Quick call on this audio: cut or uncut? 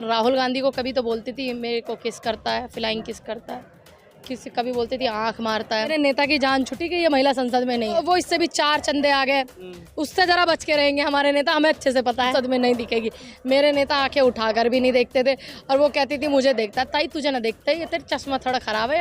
cut